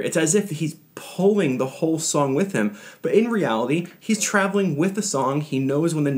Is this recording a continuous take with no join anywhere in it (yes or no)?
yes